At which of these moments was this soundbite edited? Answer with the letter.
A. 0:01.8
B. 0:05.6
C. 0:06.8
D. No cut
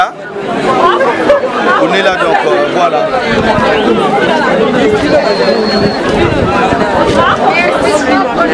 D